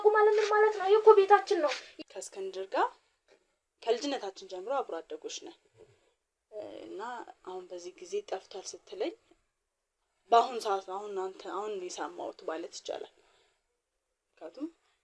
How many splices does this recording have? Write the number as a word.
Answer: one